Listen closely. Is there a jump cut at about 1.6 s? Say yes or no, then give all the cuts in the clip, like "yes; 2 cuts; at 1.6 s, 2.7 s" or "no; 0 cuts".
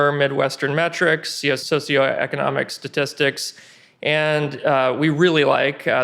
yes; 1 cut; at 1.6 s